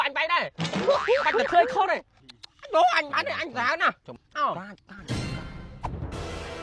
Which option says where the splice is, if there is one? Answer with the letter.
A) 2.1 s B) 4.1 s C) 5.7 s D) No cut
B